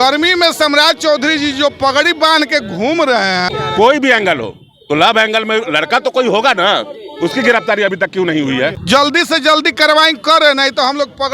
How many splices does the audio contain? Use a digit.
2